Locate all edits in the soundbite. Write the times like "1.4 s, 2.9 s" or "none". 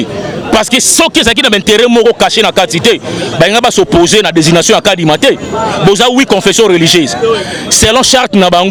none